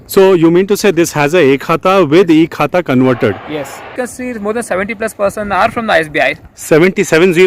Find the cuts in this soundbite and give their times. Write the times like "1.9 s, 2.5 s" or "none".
3.9 s